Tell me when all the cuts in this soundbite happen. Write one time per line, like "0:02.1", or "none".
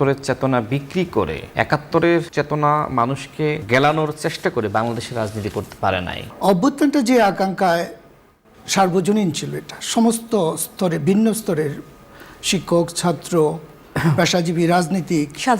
0:01.5
0:02.3
0:03.6
0:06.2

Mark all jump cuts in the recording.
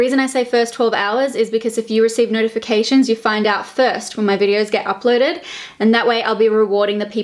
none

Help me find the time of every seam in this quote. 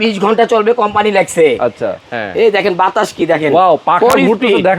0:02.0

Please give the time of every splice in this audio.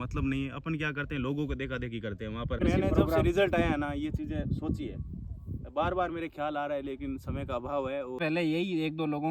0:02.6
0:08.2

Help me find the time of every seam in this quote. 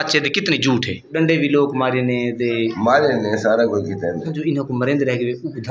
0:01.1
0:04.3

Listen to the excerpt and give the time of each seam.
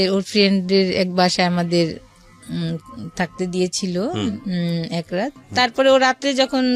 0:05.4

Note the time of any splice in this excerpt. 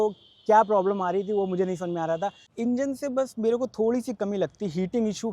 0:02.4

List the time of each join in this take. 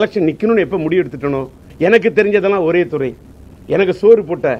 0:01.6

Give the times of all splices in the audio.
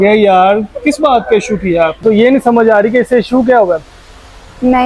0:02.0

